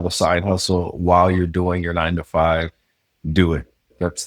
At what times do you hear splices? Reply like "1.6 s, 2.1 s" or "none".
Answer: none